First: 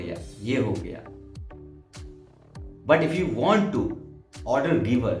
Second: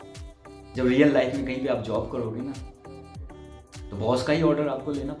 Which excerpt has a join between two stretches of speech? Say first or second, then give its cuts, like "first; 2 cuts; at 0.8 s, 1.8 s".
first; 2 cuts; at 1.0 s, 2.8 s